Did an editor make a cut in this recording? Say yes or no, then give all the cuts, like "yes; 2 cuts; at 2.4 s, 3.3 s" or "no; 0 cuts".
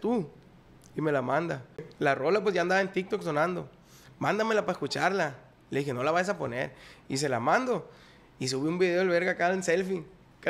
yes; 1 cut; at 1.9 s